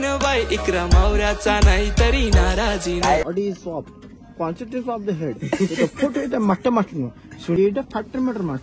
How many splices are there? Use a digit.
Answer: 2